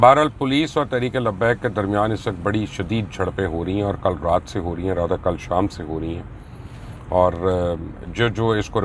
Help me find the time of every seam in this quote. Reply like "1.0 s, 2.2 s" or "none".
none